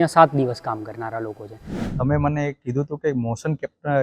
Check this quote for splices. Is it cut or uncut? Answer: cut